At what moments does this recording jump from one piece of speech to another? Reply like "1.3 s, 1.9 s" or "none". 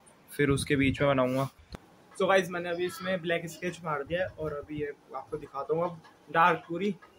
none